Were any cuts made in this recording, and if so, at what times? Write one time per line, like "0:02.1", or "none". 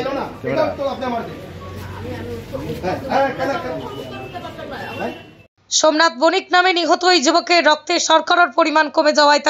0:05.6